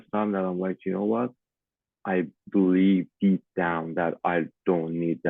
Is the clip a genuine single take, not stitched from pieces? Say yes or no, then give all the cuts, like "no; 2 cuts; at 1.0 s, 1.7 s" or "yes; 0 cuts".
yes; 0 cuts